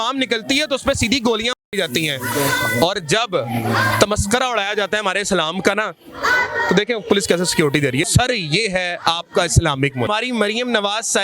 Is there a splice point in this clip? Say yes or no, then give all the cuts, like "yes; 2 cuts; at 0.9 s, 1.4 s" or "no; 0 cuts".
yes; 2 cuts; at 8.1 s, 10.1 s